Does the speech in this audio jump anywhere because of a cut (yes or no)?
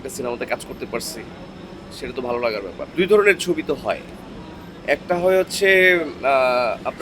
no